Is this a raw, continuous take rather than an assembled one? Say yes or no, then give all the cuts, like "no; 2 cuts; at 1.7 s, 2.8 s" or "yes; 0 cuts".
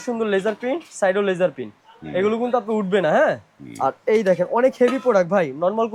yes; 0 cuts